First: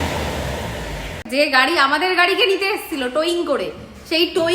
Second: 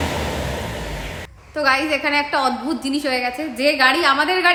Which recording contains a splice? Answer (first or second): first